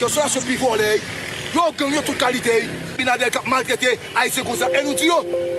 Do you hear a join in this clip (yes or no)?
yes